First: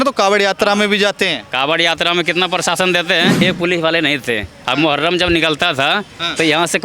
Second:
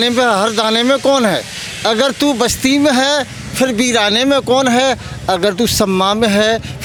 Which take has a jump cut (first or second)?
first